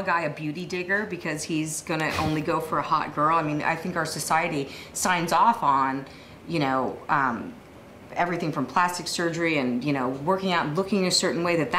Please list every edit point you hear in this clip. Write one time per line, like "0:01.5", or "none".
none